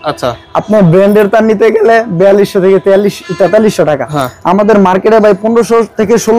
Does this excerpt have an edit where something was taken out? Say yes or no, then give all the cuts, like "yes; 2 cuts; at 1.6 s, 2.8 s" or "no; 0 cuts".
no; 0 cuts